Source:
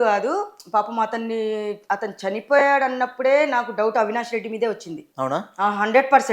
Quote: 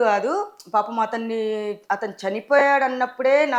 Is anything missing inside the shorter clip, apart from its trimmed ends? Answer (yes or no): no